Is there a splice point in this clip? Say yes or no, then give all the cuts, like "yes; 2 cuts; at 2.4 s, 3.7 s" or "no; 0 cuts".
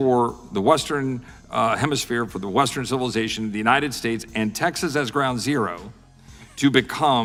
no; 0 cuts